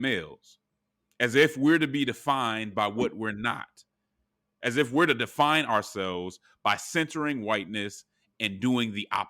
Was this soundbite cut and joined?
yes; 1 cut; at 4.4 s

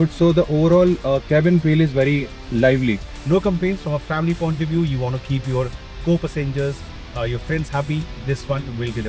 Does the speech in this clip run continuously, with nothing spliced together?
no; 1 cut; at 3.1 s

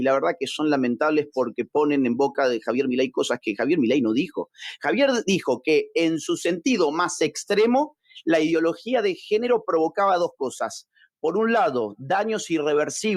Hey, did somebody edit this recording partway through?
no; 0 cuts

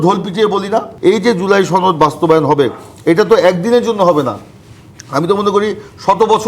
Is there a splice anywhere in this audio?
yes; 1 cut; at 0.9 s

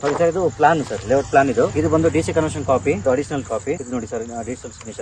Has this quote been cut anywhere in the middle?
yes; 2 cuts; at 1.7 s, 3.0 s

